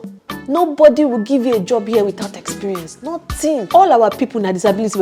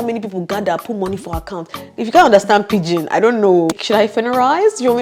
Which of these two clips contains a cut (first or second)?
second